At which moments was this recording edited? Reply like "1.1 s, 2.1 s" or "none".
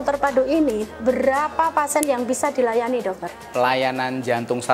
3.4 s